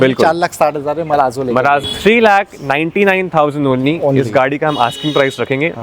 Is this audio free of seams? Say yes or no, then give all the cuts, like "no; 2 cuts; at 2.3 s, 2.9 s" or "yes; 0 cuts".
no; 1 cut; at 1.8 s